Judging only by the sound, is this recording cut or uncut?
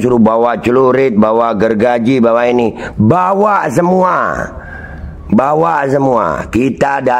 uncut